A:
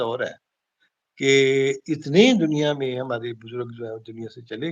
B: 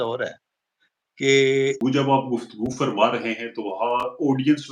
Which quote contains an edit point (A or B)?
B